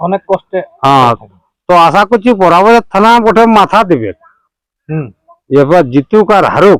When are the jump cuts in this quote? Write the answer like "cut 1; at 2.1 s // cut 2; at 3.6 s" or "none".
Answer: none